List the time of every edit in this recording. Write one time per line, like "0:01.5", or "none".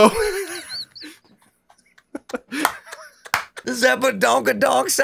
0:03.7